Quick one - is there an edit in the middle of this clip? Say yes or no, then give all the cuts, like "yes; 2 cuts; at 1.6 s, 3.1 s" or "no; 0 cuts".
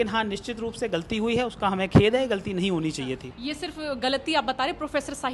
no; 0 cuts